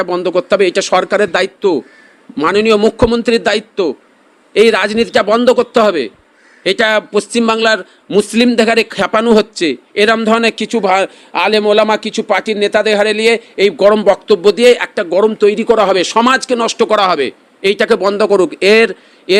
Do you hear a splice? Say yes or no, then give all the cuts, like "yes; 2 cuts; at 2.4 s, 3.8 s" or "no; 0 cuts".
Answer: no; 0 cuts